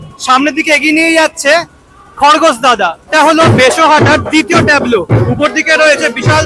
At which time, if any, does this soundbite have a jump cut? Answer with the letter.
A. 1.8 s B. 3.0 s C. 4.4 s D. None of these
B